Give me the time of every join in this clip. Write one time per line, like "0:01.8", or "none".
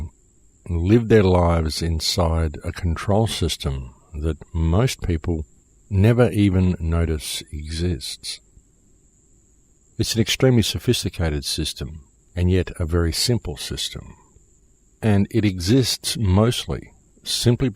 0:13.5